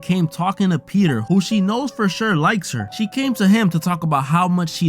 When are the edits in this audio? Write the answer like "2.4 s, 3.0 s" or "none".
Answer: 1.2 s